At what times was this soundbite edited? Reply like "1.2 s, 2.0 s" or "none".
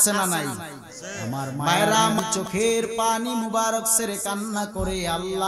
2.2 s